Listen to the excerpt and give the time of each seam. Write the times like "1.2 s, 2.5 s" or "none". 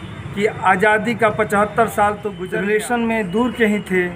2.3 s

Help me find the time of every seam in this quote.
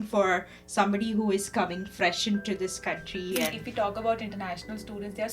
3.6 s

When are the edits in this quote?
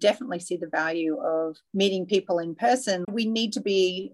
1.6 s, 3.0 s

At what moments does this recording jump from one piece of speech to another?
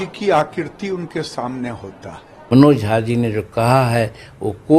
2.5 s

